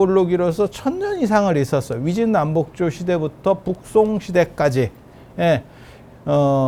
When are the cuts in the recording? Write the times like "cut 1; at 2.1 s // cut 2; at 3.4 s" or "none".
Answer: none